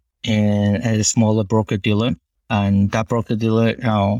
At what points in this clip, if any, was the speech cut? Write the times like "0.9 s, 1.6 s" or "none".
2.3 s